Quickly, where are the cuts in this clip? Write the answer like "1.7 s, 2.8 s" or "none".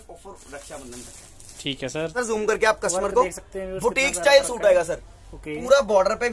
2.2 s